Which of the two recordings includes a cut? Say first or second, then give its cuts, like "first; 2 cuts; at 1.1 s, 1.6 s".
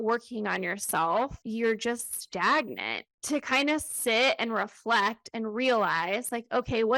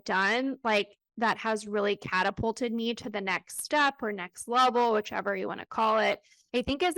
first; 2 cuts; at 1.4 s, 3.1 s